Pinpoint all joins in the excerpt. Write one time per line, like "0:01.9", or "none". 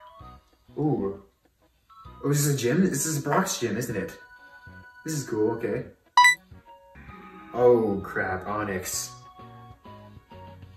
0:06.9

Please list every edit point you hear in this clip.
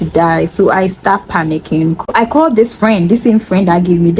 0:02.1

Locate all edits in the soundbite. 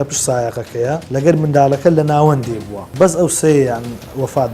0:01.0
0:02.8

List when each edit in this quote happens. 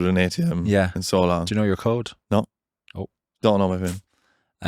0:02.2

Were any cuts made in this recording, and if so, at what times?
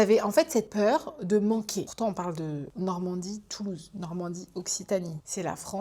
none

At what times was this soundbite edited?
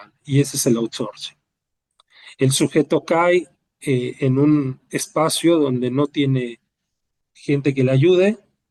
none

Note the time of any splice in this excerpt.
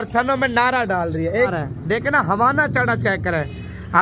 0:01.5

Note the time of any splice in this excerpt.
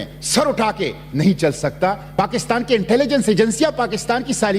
0:02.1

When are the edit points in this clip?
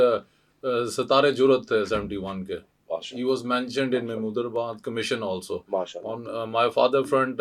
none

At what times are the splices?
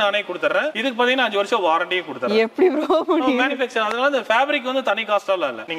none

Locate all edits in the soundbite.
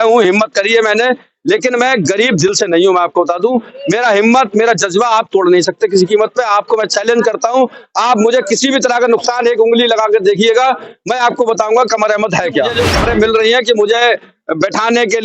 0:12.7

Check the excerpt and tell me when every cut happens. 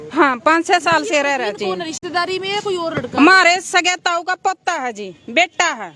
none

